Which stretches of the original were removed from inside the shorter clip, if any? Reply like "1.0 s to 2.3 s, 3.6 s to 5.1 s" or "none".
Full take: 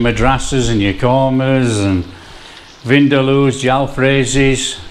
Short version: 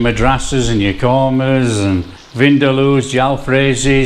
2.2 s to 2.7 s